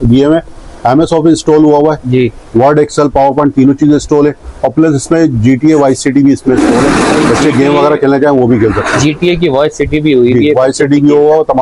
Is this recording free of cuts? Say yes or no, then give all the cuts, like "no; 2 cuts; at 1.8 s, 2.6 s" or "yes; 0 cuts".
yes; 0 cuts